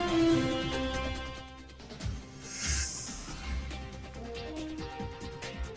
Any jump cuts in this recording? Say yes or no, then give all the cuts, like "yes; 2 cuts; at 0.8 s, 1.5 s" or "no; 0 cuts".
yes; 1 cut; at 3.5 s